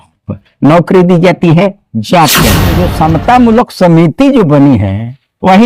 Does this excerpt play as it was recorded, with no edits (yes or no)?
no